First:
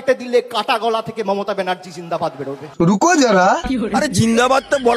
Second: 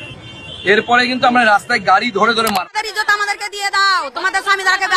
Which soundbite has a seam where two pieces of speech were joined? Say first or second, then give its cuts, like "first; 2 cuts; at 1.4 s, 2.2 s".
second; 1 cut; at 2.7 s